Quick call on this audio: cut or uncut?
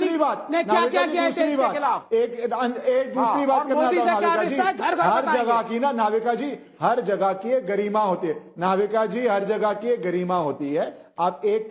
cut